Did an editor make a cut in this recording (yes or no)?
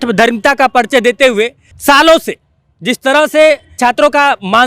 yes